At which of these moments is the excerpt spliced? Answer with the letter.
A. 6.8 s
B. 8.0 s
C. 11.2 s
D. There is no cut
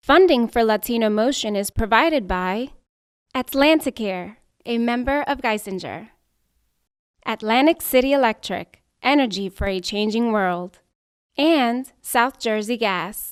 D